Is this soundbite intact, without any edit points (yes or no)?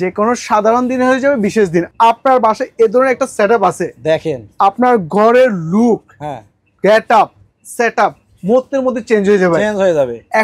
no